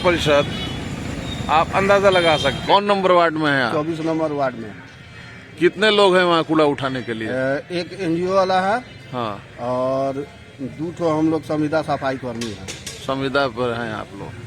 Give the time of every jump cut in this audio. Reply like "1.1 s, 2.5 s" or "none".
2.6 s